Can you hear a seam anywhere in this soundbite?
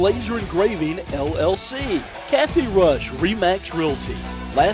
yes; 1 cut; at 2.1 s

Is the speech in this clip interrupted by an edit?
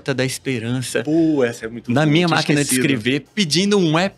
no; 0 cuts

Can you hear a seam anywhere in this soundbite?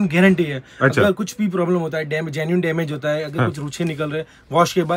no; 0 cuts

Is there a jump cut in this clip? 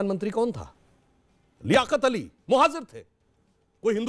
no; 0 cuts

